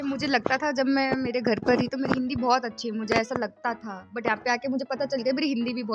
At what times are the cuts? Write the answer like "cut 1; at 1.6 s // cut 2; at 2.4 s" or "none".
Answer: none